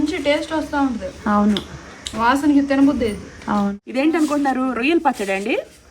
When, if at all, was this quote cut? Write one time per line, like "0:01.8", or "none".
0:03.7